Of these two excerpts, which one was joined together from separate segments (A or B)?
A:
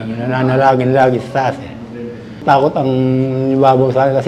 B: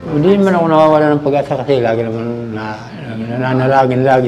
A